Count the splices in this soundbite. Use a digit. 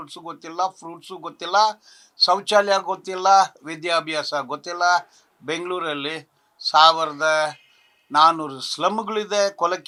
0